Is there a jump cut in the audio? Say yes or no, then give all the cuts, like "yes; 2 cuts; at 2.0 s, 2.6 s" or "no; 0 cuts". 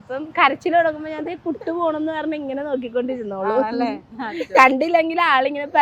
no; 0 cuts